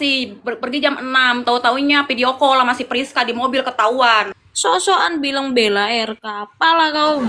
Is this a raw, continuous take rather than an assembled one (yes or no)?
no